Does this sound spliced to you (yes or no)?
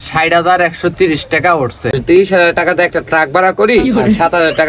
yes